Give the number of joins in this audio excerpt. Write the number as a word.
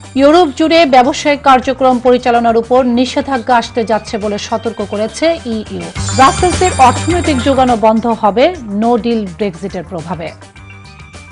one